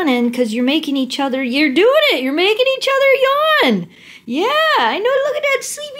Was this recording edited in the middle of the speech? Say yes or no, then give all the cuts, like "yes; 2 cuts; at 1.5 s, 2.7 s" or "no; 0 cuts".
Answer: no; 0 cuts